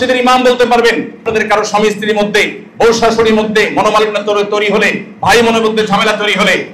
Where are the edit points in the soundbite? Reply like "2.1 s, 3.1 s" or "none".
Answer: 1.3 s